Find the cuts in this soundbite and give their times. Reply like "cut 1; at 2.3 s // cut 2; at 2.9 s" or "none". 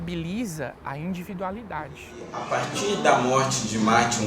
cut 1; at 2.4 s